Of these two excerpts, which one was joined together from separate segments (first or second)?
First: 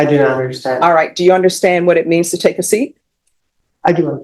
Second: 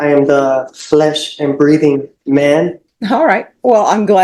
second